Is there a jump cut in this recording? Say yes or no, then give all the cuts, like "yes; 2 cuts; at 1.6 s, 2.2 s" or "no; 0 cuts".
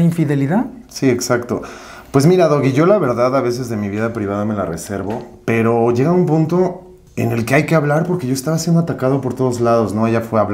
no; 0 cuts